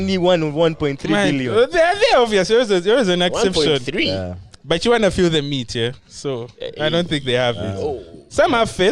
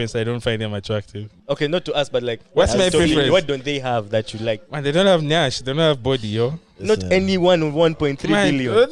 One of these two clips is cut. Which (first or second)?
second